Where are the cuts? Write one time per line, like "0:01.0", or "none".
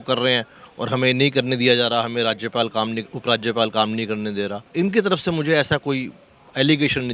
0:04.6